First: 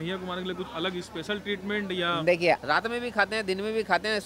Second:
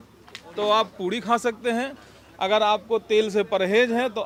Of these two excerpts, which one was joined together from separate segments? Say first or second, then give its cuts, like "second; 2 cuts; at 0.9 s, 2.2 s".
first; 1 cut; at 2.6 s